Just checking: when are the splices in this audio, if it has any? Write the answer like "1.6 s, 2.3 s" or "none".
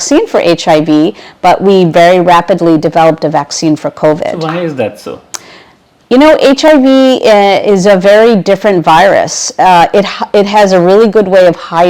none